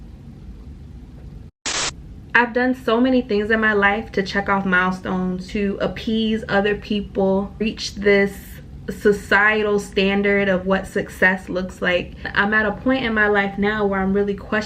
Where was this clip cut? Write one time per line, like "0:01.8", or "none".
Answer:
0:01.9
0:05.4
0:07.6
0:12.3

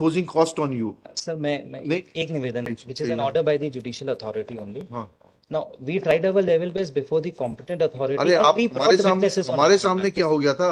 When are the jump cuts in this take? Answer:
0:02.7

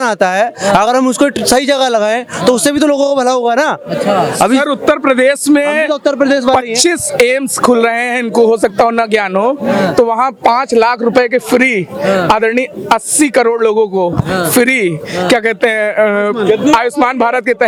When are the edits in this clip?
none

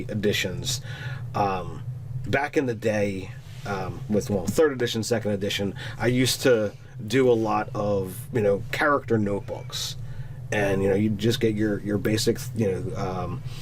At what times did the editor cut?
0:07.9

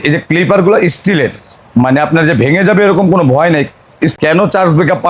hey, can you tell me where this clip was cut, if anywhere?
0:04.2

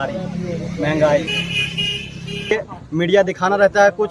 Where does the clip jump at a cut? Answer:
0:02.5

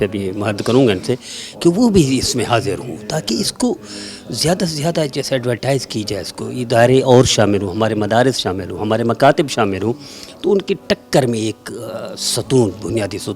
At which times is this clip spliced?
none

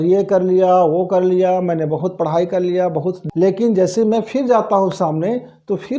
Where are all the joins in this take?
0:03.2

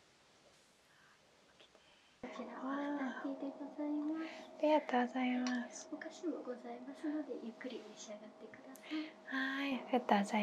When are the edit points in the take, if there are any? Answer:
0:02.2

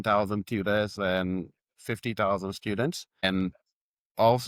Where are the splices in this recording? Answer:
0:03.1

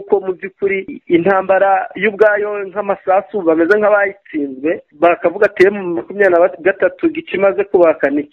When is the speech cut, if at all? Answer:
0:00.9
0:04.9

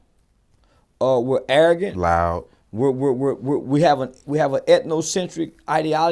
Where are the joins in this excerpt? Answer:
none

